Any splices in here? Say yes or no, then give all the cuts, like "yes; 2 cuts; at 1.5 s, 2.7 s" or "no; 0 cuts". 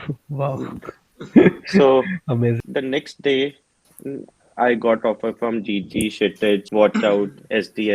yes; 2 cuts; at 2.6 s, 6.7 s